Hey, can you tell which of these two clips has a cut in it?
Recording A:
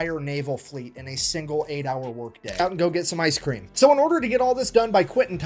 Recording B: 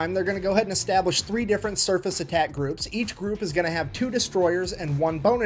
A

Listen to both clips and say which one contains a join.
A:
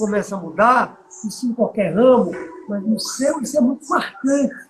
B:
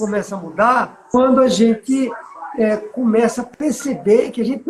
B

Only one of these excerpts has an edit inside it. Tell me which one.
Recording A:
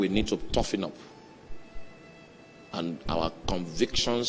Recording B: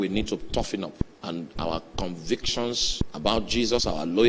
B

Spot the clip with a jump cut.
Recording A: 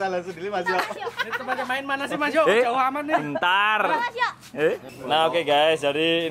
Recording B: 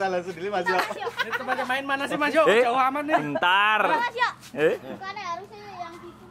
A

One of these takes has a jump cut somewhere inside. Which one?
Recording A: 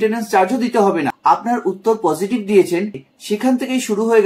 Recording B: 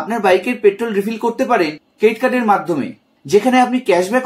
A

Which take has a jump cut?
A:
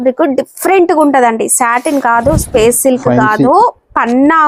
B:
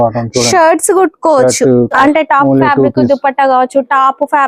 B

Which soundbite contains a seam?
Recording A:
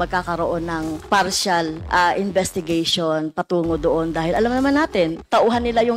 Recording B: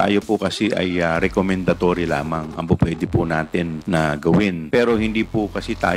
B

